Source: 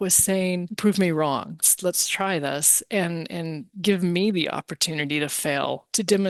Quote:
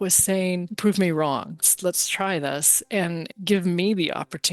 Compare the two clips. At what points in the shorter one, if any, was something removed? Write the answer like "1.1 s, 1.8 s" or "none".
3.3 s